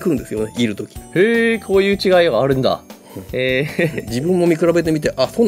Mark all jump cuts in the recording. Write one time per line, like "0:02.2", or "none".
none